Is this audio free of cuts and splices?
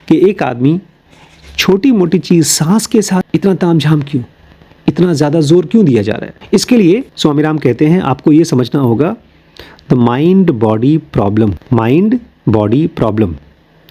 no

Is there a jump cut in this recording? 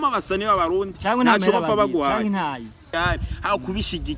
yes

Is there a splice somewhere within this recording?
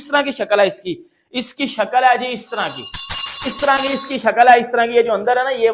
no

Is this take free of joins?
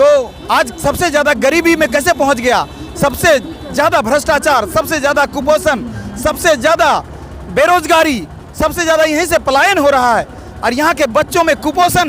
yes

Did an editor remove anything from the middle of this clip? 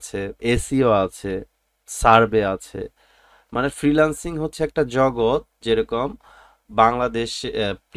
no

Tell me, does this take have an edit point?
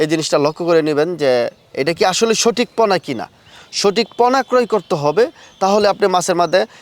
no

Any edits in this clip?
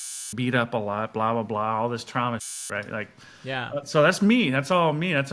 no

